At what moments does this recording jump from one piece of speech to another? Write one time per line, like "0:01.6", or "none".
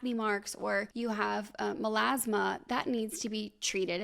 0:00.9

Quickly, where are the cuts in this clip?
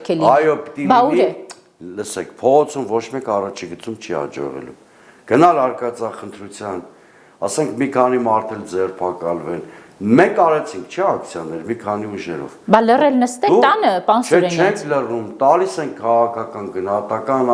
none

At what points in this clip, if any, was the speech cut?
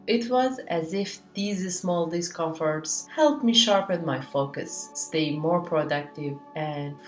none

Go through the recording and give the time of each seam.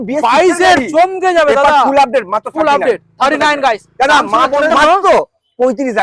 0:04.7

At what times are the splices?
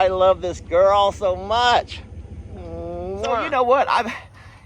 0:03.4

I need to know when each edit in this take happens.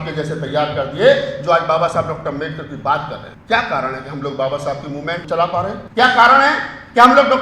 0:03.3
0:05.3

